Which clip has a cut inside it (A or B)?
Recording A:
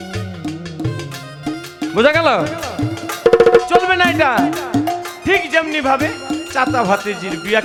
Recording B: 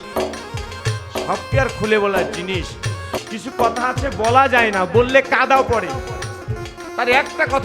B